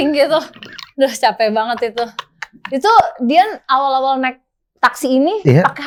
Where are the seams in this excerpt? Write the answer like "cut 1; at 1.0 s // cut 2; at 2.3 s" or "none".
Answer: none